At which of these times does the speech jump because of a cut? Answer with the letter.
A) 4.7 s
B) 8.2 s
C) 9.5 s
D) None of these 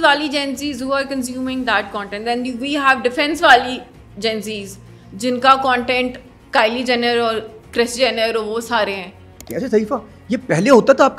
C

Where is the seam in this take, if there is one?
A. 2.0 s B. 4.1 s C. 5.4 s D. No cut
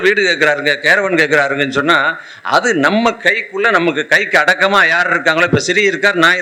D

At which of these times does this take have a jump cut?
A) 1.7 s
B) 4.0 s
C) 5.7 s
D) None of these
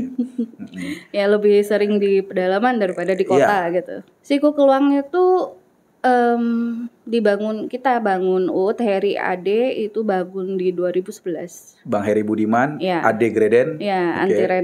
B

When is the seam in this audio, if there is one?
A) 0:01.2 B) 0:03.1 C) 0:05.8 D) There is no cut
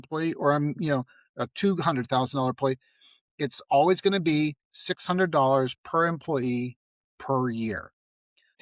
D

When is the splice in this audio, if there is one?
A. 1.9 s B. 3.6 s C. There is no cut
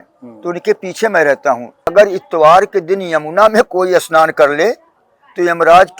A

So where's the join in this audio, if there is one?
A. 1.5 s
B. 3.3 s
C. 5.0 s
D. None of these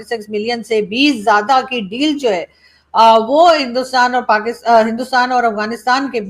D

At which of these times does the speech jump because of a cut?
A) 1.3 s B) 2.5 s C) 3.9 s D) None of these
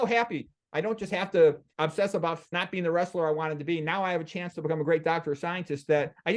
B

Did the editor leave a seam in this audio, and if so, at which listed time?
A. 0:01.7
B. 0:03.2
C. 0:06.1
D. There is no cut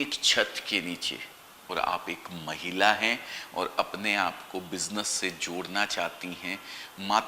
A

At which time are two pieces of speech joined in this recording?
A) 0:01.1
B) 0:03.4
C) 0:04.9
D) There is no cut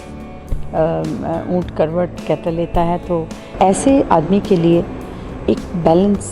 B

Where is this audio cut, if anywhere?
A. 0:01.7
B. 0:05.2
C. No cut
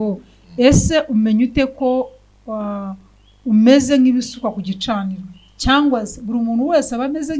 C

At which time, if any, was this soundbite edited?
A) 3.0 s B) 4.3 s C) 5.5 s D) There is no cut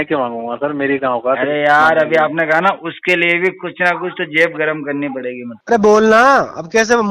C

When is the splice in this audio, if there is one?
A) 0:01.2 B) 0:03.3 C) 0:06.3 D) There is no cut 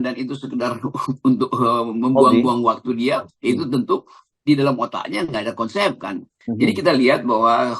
C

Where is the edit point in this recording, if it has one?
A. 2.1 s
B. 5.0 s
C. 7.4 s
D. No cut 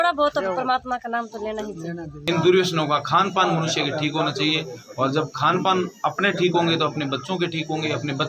A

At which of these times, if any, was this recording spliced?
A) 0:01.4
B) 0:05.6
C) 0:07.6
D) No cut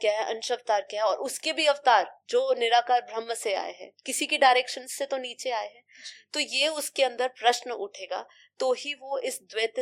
D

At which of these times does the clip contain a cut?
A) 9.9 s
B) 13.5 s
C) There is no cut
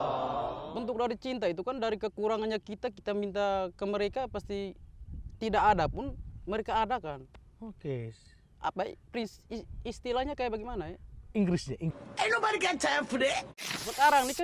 B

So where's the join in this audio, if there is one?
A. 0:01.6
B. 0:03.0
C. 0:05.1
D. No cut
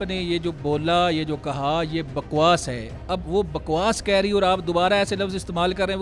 D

